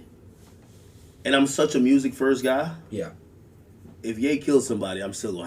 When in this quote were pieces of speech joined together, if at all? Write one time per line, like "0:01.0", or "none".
0:02.0